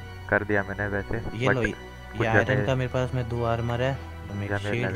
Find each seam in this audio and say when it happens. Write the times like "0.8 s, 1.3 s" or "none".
none